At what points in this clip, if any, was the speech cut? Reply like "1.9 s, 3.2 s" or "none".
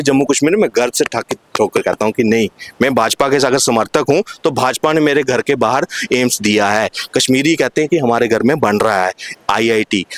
none